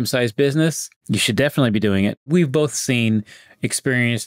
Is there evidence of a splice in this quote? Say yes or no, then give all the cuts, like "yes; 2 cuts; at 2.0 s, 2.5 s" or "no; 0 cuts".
yes; 2 cuts; at 0.9 s, 2.3 s